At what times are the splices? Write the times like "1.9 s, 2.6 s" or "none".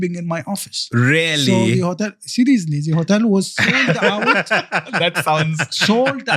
none